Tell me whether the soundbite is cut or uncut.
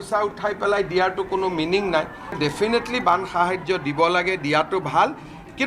cut